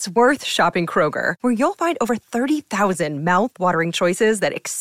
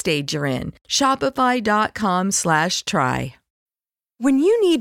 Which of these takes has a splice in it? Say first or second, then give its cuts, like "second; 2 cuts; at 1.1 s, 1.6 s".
second; 1 cut; at 3.4 s